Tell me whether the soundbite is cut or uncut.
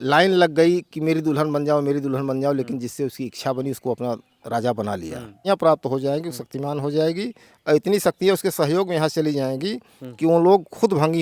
cut